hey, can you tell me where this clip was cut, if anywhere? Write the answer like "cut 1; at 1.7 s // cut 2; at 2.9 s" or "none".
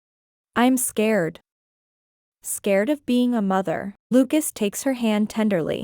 cut 1; at 4.1 s